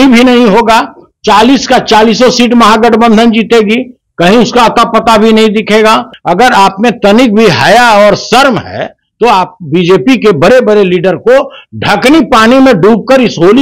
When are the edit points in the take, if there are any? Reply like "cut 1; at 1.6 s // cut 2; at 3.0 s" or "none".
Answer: cut 1; at 6.1 s